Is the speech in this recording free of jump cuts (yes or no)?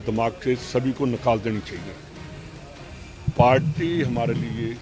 yes